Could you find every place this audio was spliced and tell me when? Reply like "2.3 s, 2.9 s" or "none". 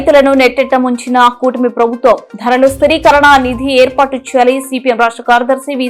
none